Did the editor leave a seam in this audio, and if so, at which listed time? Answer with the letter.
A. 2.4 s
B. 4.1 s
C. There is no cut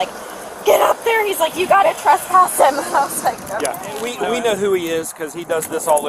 B